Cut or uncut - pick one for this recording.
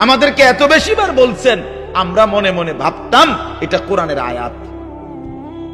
cut